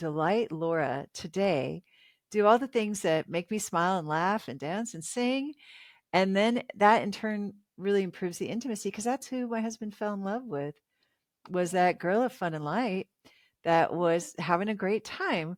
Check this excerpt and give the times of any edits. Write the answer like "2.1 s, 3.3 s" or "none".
none